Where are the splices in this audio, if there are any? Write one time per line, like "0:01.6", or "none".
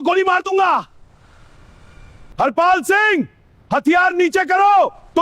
0:02.3